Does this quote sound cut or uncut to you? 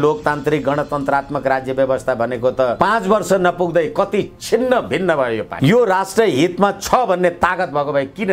cut